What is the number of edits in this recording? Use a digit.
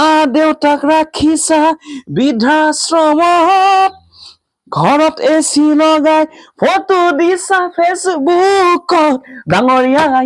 0